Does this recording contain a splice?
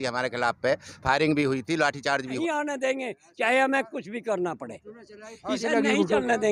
yes; 1 cut; at 2.4 s

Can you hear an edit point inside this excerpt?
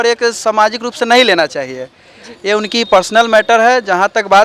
no; 0 cuts

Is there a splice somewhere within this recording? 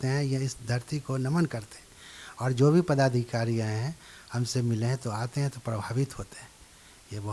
no; 0 cuts

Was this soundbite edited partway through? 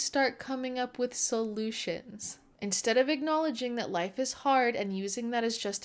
no; 0 cuts

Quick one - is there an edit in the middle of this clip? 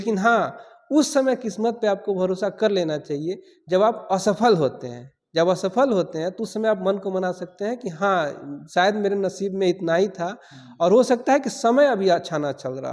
no; 0 cuts

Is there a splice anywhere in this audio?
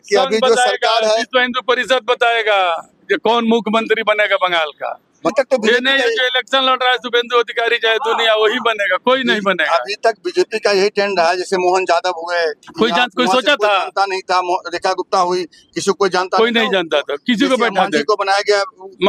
no; 0 cuts

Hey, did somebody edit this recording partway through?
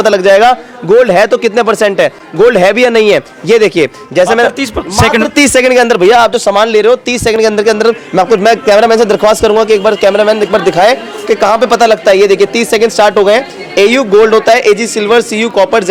no; 0 cuts

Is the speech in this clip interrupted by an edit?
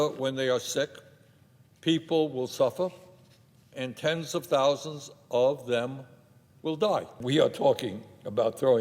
yes; 1 cut; at 7.2 s

